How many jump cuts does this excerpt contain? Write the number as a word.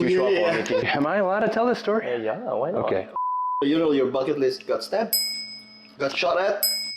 two